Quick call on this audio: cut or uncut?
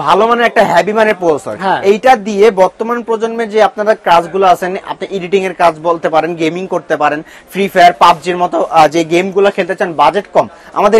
uncut